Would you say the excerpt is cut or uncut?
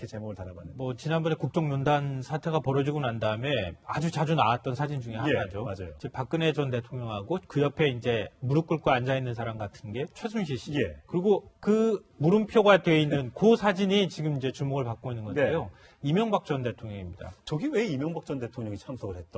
cut